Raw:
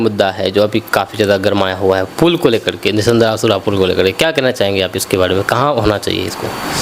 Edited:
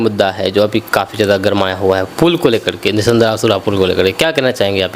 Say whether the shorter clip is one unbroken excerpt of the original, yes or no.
yes